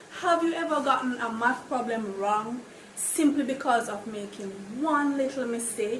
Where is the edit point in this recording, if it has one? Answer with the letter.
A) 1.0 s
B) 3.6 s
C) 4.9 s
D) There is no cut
B